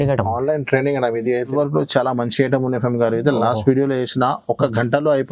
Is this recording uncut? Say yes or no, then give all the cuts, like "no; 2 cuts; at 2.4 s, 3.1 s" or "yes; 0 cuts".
no; 1 cut; at 1.5 s